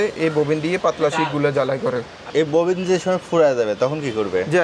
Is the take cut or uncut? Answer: cut